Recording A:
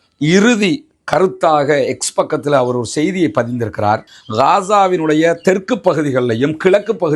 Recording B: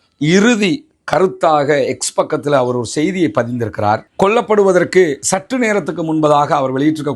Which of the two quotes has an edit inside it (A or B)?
A